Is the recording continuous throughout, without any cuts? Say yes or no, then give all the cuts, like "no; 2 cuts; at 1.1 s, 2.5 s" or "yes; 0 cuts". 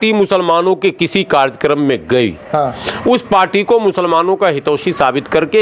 yes; 0 cuts